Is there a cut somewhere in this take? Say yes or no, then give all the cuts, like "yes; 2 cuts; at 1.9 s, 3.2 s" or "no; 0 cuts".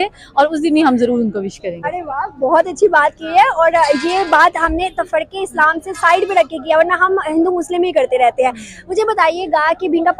no; 0 cuts